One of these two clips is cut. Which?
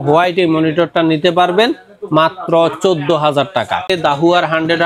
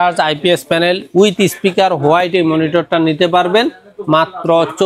first; 1 cut; at 3.9 s

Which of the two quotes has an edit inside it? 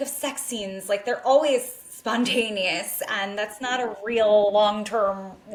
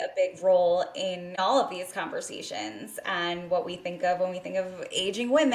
second; 1 cut; at 1.3 s

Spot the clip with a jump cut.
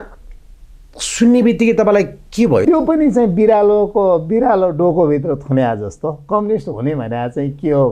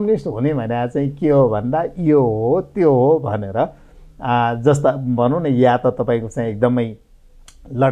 first; 1 cut; at 2.6 s

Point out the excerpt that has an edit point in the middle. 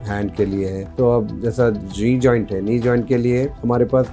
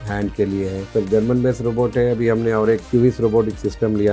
second; 2 cuts; at 0.9 s, 2.8 s

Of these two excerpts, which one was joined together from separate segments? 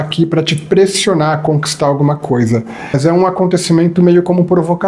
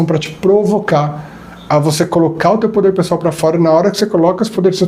first; 1 cut; at 3.0 s

